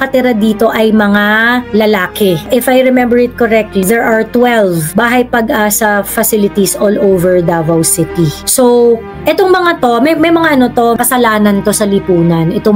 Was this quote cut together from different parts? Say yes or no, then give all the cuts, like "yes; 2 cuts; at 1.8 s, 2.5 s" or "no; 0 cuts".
yes; 5 cuts; at 1.7 s, 2.5 s, 3.8 s, 4.8 s, 11.0 s